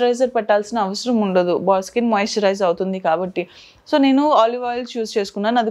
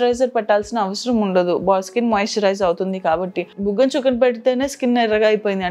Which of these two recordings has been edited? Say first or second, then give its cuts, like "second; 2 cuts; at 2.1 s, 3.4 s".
second; 1 cut; at 3.5 s